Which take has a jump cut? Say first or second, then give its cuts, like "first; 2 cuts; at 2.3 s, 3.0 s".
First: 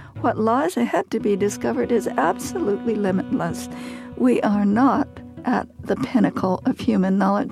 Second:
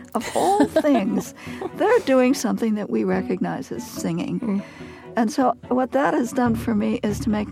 first; 1 cut; at 5.5 s